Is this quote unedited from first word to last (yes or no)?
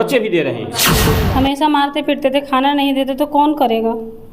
no